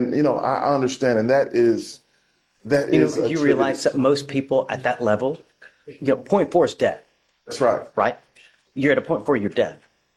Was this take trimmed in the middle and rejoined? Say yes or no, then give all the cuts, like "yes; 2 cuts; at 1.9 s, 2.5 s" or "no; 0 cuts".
no; 0 cuts